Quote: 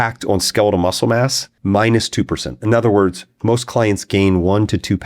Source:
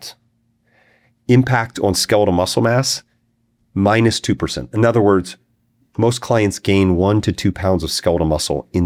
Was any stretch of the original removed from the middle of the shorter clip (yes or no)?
yes